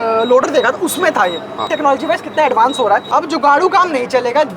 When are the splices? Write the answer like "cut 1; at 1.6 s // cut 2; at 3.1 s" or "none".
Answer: cut 1; at 1.7 s // cut 2; at 3.1 s